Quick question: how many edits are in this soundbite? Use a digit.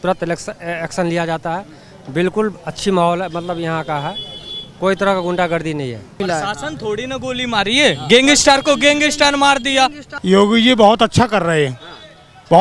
2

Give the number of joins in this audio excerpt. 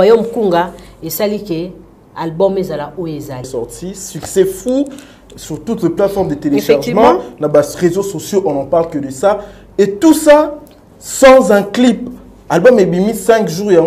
1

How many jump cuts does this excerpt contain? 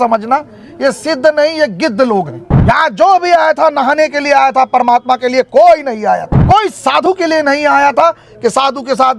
2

